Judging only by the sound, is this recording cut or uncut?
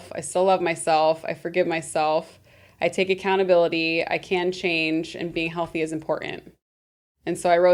uncut